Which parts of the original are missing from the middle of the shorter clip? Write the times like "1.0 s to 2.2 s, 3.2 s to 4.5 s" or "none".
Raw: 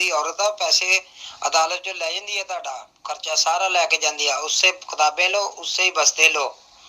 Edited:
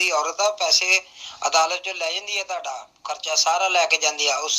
none